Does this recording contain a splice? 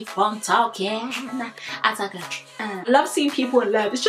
yes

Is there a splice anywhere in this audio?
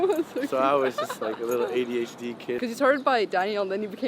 yes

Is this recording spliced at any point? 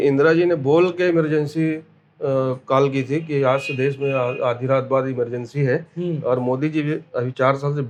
no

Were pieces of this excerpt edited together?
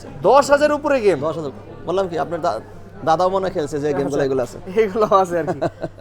no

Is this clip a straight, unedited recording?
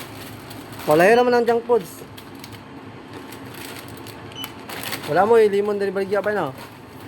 yes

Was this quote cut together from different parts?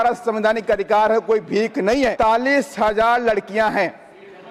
yes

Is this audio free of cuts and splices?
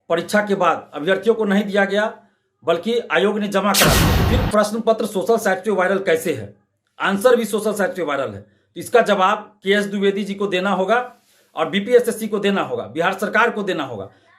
no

